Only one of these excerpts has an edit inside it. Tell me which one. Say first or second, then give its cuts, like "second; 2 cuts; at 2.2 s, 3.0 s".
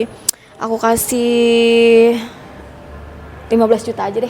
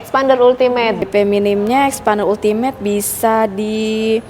second; 1 cut; at 1.0 s